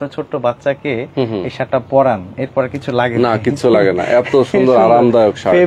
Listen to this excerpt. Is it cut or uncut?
uncut